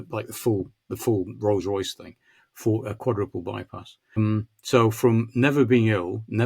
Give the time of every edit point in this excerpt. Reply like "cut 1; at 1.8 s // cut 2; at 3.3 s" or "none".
cut 1; at 4.2 s